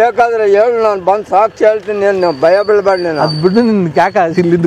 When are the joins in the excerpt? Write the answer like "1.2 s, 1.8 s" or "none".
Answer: none